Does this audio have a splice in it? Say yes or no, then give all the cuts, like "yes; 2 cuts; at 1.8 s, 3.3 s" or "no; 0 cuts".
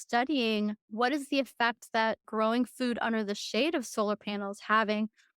yes; 2 cuts; at 0.8 s, 2.3 s